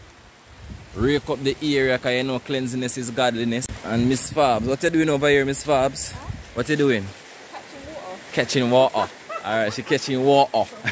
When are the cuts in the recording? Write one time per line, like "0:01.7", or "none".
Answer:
0:03.7

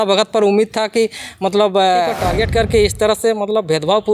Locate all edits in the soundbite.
0:02.2

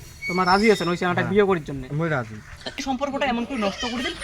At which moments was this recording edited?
0:02.8

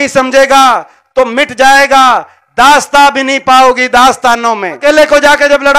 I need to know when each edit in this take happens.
0:04.8

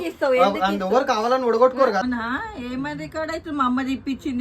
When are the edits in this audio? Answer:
0:02.0

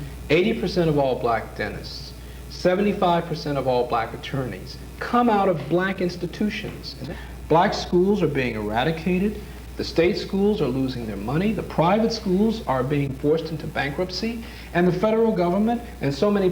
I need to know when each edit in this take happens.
0:06.9

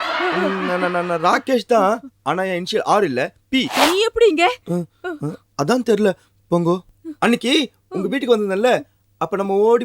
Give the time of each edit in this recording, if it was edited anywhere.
0:03.8

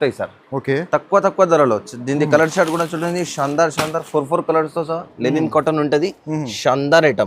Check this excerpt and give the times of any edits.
0:05.1

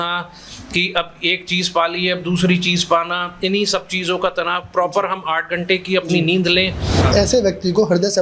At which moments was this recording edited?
0:07.0

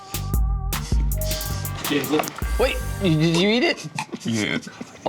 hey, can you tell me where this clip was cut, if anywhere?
0:01.5

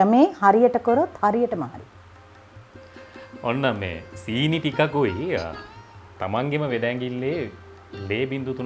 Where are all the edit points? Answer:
none

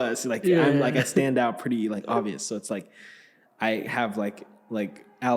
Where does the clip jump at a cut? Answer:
none

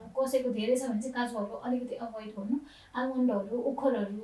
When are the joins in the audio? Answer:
none

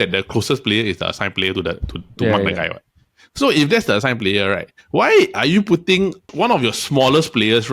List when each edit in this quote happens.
0:06.2

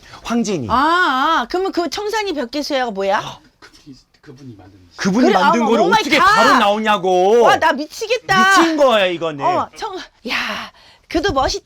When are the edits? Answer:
0:10.2

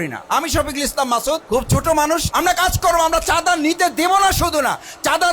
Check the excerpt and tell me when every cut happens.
0:01.4
0:02.3

